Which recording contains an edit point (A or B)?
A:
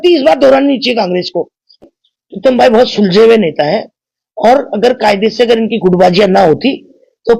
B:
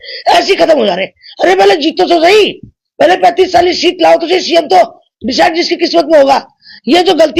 A